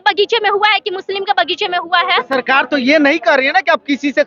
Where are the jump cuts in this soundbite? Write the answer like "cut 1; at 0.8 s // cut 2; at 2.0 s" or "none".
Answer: none